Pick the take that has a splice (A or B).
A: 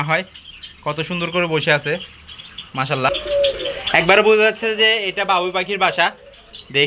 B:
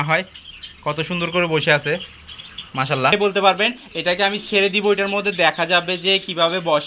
B